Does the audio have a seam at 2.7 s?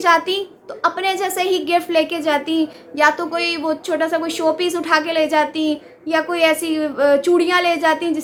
no; 0 cuts

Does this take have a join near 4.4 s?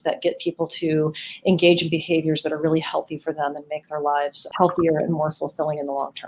yes; 1 cut; at 4.4 s

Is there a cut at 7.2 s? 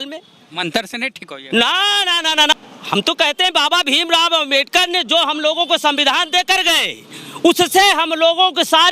no; 1 cut; at 2.5 s

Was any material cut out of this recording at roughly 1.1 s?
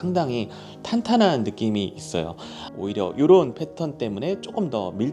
no; 1 cut; at 2.6 s

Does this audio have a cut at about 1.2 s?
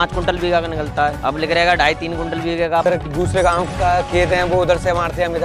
yes; 2 cuts; at 1.2 s, 2.8 s

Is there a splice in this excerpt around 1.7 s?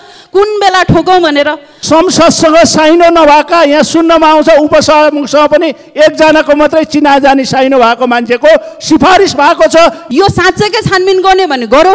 yes; 2 cuts; at 1.7 s, 10.0 s

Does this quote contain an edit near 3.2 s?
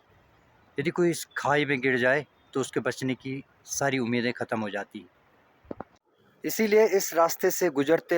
no; 1 cut; at 5.9 s

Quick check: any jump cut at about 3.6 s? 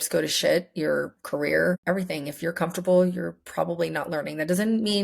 no; 1 cut; at 1.8 s

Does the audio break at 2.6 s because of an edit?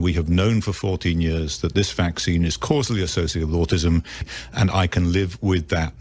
no; 1 cut; at 4.3 s

